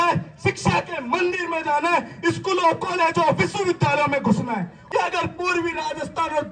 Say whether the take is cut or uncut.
cut